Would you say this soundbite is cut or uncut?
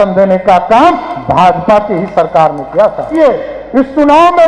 cut